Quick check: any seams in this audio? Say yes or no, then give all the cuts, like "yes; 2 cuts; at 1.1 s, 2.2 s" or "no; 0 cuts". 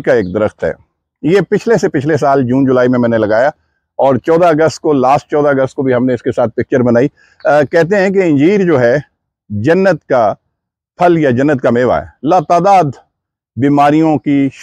no; 0 cuts